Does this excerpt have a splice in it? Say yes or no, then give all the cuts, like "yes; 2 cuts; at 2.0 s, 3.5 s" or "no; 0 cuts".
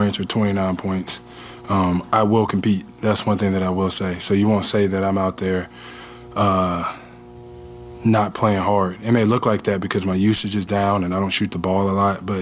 no; 0 cuts